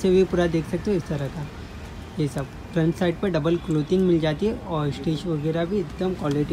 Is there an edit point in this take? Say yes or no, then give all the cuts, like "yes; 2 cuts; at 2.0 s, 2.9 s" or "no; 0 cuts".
no; 0 cuts